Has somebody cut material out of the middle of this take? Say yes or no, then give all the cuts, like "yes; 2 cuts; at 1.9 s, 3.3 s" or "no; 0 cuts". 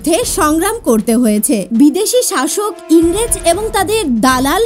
yes; 1 cut; at 1.7 s